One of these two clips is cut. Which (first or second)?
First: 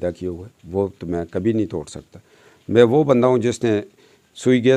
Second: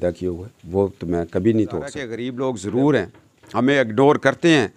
second